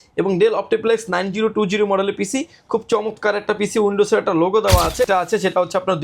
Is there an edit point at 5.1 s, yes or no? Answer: yes